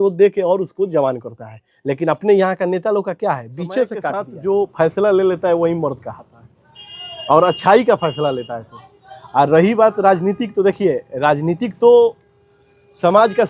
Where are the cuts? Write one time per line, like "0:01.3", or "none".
0:04.3